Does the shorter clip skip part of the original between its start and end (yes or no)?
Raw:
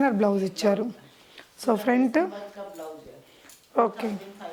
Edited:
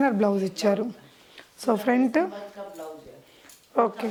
no